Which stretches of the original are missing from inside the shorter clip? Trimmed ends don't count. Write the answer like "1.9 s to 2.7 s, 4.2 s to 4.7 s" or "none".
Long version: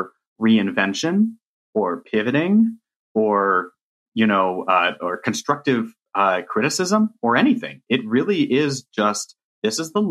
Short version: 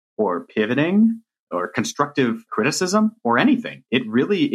3.0 s to 4.9 s, 6.0 s to 6.5 s